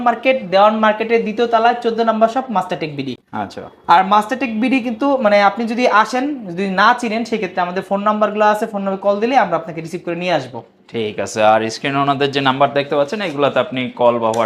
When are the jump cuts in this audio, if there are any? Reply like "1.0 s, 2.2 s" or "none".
none